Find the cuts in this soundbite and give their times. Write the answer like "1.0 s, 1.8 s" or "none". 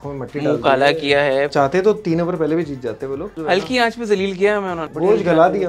1.5 s, 3.3 s, 4.8 s